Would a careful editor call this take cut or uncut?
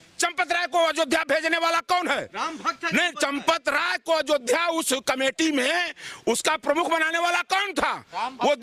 uncut